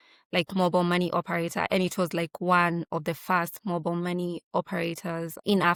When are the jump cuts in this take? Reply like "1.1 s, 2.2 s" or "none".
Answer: none